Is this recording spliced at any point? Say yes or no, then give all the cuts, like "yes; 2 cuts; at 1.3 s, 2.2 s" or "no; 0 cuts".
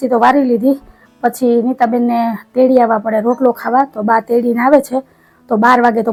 no; 0 cuts